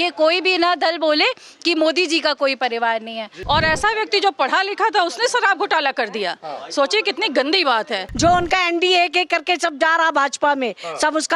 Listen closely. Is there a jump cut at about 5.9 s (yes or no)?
no